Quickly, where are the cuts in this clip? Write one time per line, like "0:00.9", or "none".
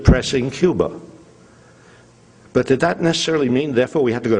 0:01.0